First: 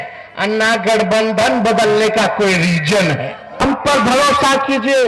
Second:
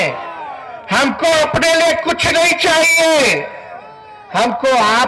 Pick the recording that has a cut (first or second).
first